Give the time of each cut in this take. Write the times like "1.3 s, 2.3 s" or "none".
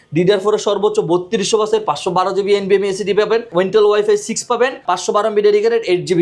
3.5 s, 4.8 s